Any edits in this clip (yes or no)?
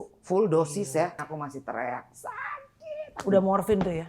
yes